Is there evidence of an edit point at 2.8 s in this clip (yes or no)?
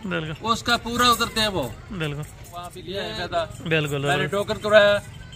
yes